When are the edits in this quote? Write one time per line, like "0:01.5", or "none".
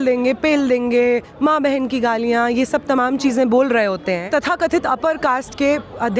0:04.2